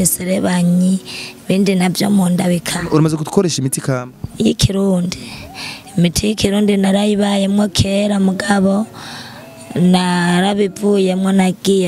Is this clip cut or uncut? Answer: uncut